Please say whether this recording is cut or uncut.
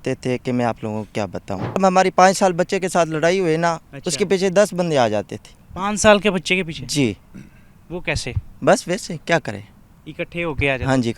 cut